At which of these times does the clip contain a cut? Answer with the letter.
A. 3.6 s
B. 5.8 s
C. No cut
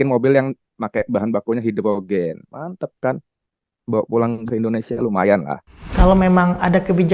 B